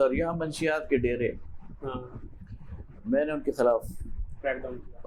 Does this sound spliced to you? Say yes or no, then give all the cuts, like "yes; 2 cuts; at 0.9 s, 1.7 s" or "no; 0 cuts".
no; 0 cuts